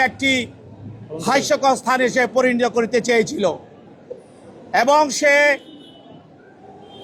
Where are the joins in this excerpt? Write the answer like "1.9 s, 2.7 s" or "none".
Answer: none